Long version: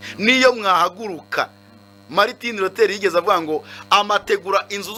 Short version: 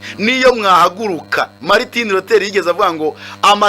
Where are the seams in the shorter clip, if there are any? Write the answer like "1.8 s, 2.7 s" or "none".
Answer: 1.6 s